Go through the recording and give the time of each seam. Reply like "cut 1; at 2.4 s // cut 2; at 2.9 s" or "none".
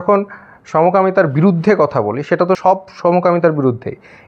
cut 1; at 2.6 s